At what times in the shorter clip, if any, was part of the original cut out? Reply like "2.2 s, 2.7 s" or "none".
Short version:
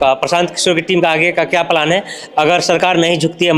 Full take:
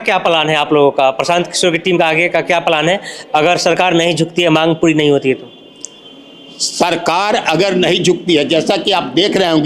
none